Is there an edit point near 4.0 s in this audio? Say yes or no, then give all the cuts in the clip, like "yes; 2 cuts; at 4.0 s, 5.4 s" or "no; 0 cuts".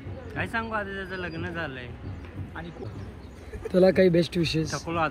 no; 1 cut; at 2.8 s